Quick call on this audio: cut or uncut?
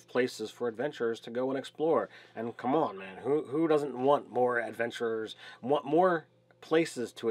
uncut